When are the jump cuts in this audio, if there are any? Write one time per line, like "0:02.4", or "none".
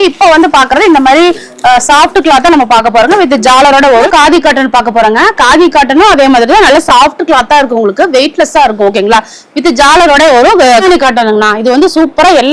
0:04.1
0:10.8

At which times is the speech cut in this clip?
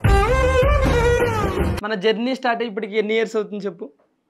0:01.8

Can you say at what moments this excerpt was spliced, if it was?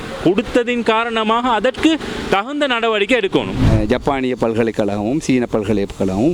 0:03.7

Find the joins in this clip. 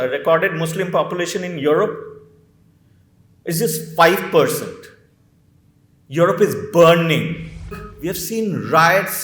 0:07.9

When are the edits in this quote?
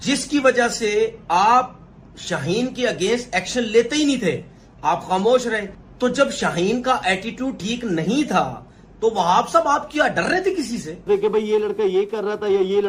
0:05.8
0:11.0

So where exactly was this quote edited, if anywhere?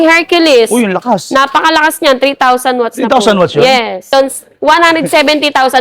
0:04.1

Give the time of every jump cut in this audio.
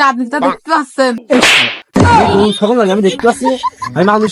0:01.2

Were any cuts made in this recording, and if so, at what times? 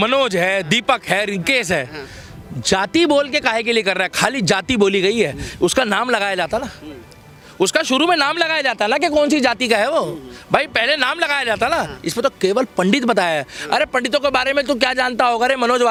none

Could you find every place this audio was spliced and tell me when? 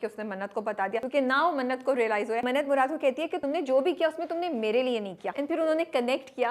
0:01.0
0:02.4
0:03.4
0:05.3

